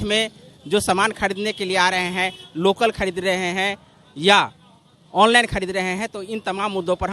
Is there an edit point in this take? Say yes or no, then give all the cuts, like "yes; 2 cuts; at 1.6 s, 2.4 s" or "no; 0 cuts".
no; 0 cuts